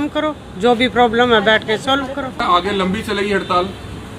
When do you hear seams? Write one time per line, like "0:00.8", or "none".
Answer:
0:02.4